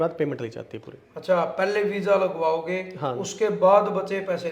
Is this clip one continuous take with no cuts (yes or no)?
yes